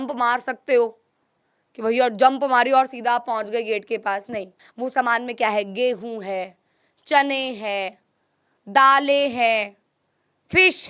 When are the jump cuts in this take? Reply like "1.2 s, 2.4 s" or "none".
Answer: 4.6 s